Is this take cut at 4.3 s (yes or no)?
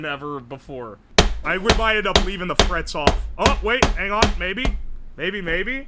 no